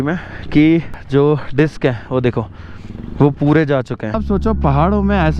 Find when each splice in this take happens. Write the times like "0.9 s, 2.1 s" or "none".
1.0 s, 4.2 s

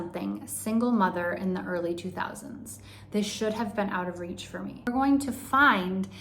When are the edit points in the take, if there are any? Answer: 4.9 s

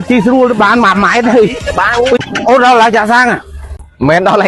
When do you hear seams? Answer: 2.2 s

